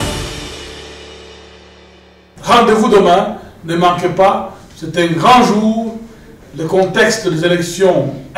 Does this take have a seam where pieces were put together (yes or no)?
yes